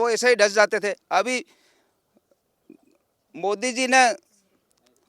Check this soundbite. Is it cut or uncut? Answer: uncut